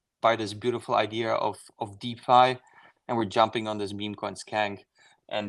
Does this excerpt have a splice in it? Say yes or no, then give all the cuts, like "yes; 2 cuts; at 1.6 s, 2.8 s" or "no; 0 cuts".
no; 0 cuts